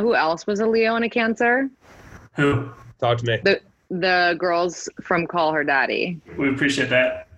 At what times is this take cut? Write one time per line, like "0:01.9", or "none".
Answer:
0:06.3